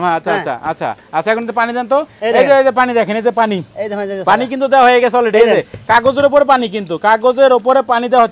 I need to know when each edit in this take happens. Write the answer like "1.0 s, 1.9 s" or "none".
2.1 s